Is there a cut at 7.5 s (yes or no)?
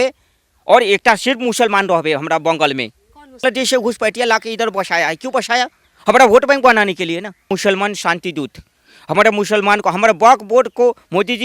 yes